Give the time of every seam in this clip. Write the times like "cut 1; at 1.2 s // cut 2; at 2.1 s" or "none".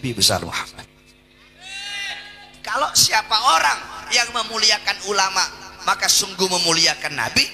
cut 1; at 2.6 s